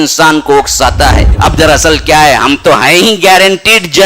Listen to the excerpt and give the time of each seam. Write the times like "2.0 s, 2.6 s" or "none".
1.3 s